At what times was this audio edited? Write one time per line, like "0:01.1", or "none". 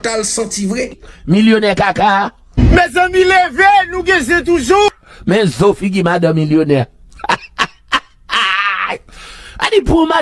0:01.0